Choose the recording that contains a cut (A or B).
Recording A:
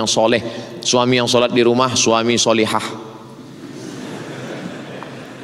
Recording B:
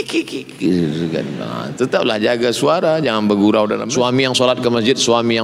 B